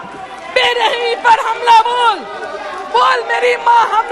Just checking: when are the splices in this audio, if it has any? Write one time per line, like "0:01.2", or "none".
none